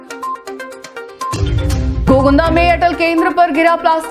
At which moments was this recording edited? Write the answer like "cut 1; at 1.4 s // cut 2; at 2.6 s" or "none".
cut 1; at 1.8 s